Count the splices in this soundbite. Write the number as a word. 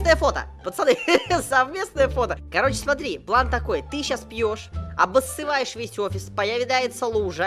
one